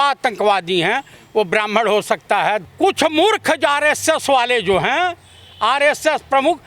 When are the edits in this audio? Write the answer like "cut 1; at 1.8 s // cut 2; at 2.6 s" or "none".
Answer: cut 1; at 2.6 s